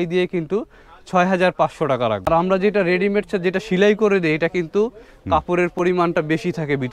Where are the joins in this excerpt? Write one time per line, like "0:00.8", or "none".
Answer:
0:02.3